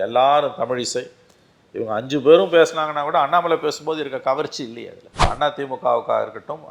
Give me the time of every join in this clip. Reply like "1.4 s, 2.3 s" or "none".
5.3 s